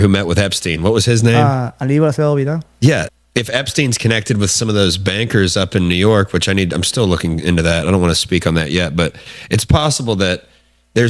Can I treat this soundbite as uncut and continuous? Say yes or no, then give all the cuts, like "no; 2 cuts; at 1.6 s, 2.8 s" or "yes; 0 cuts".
no; 1 cut; at 3.1 s